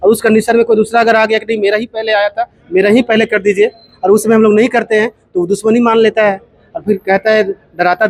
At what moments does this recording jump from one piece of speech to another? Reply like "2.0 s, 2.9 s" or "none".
none